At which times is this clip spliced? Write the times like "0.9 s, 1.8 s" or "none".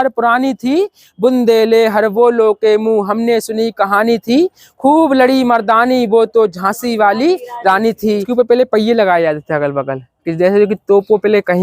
8.3 s